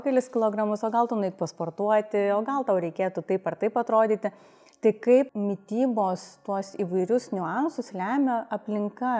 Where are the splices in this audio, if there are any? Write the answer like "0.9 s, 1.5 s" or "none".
5.3 s